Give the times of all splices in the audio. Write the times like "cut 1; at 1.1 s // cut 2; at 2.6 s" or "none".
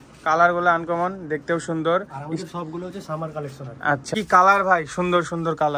cut 1; at 4.1 s

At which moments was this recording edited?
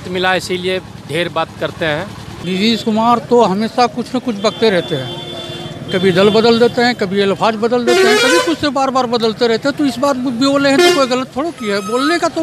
cut 1; at 2.3 s

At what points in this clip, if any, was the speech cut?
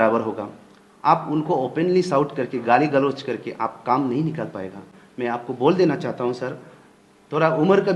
none

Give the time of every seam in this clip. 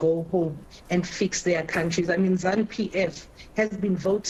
none

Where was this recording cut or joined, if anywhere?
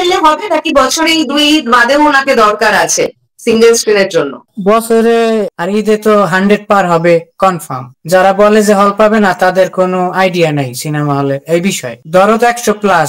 cut 1; at 5.6 s

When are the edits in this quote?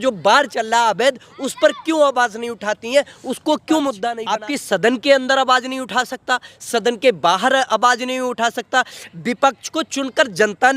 cut 1; at 4.1 s

